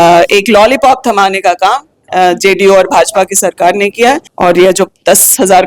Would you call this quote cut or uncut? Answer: cut